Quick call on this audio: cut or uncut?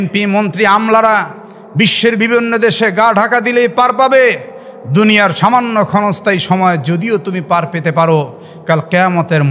uncut